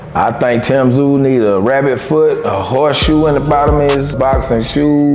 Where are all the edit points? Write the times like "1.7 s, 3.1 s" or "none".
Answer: 4.1 s